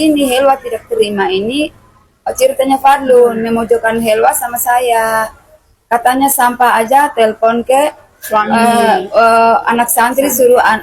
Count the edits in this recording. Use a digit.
0